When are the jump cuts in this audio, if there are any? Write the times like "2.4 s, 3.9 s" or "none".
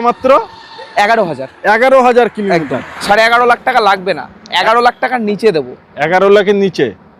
3.0 s